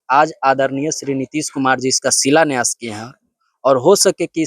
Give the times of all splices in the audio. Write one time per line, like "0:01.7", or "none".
none